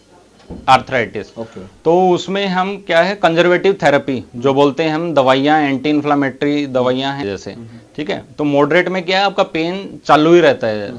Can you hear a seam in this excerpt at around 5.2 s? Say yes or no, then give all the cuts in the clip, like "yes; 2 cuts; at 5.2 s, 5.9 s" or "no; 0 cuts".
no; 1 cut; at 7.2 s